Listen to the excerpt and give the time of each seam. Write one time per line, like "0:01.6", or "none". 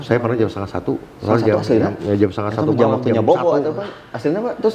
none